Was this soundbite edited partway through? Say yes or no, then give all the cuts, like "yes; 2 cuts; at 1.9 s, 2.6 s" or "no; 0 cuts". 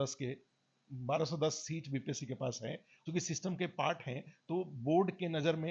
yes; 1 cut; at 2.9 s